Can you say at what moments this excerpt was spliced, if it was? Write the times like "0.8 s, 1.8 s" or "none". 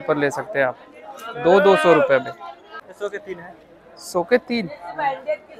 2.8 s